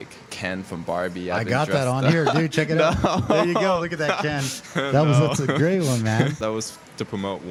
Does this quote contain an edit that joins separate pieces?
no; 0 cuts

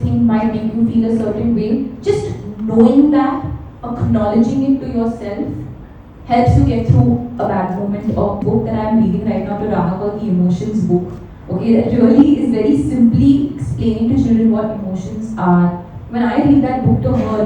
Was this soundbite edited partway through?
yes; 1 cut; at 8.4 s

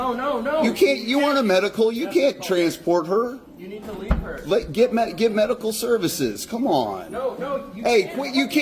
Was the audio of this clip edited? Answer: no; 0 cuts

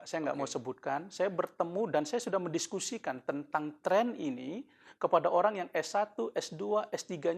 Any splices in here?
no; 0 cuts

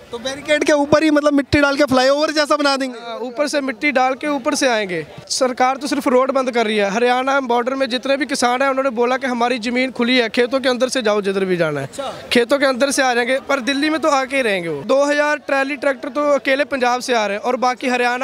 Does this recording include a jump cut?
yes; 2 cuts; at 5.3 s, 14.8 s

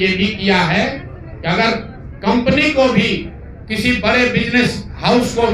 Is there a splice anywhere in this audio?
no; 0 cuts

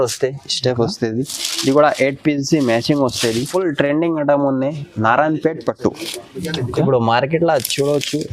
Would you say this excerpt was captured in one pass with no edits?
no; 1 cut; at 3.4 s

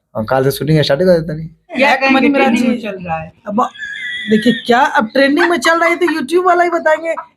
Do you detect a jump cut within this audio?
yes; 1 cut; at 1.7 s

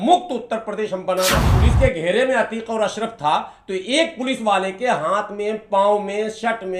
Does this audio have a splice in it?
yes; 1 cut; at 1.4 s

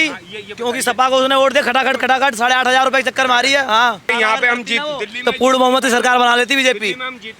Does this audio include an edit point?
yes; 1 cut; at 4.1 s

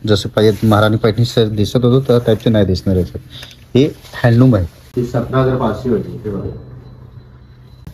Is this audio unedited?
no; 1 cut; at 4.8 s

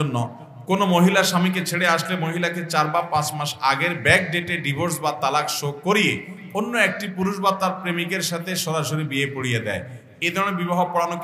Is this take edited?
no; 0 cuts

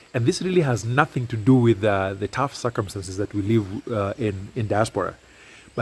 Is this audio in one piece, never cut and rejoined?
yes; 0 cuts

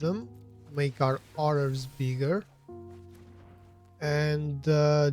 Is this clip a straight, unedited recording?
no; 2 cuts; at 2.5 s, 4.0 s

